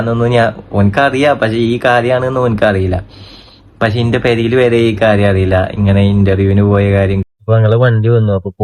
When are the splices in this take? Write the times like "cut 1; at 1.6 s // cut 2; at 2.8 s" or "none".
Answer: cut 1; at 7.3 s